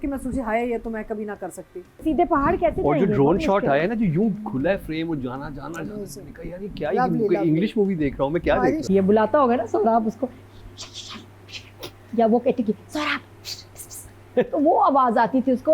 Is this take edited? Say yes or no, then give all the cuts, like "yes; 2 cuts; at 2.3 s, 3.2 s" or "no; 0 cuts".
yes; 2 cuts; at 2.0 s, 8.8 s